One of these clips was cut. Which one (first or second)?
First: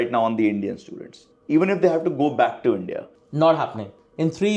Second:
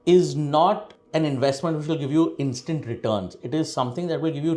first